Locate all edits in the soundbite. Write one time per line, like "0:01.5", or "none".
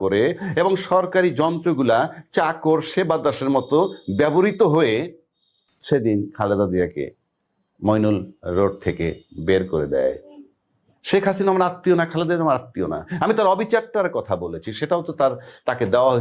none